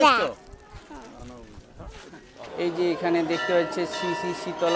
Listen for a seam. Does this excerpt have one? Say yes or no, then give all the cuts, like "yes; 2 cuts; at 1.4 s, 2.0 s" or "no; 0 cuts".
yes; 1 cut; at 2.5 s